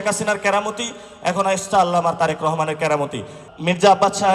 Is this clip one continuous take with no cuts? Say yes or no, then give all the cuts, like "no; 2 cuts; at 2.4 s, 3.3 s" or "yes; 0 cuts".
no; 1 cut; at 3.4 s